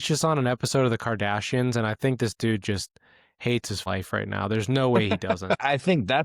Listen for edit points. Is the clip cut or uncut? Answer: cut